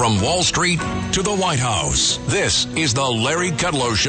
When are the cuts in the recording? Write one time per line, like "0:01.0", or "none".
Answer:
none